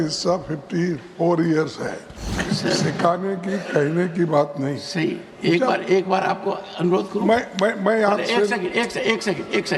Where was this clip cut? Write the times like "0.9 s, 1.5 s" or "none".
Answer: 2.4 s